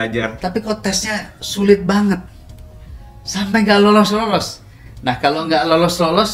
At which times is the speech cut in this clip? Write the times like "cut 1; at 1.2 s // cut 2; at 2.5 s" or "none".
none